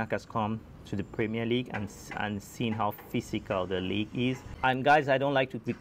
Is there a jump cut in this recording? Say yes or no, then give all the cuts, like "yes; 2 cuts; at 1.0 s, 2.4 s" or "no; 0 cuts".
yes; 1 cut; at 4.5 s